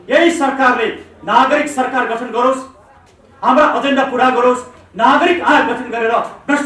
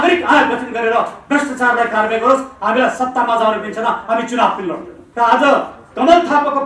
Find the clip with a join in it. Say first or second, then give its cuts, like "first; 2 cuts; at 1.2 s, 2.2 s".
second; 1 cut; at 5.0 s